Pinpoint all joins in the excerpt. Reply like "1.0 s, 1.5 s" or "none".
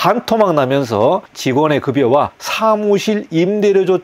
1.3 s, 2.4 s

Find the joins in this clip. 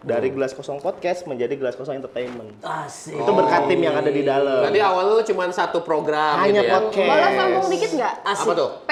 none

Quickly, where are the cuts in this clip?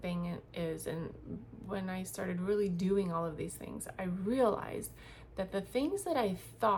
none

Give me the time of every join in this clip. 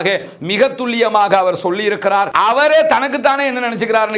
2.3 s

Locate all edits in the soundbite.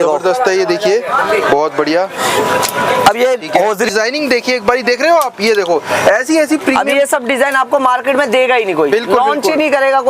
3.9 s

